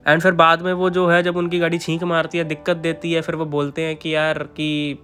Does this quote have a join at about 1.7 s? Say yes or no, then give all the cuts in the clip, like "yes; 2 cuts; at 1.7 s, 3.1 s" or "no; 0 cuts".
no; 0 cuts